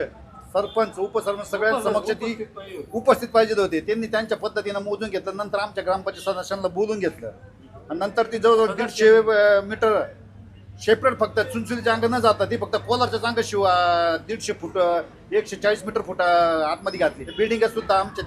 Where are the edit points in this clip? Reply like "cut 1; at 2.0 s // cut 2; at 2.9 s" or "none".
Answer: cut 1; at 17.2 s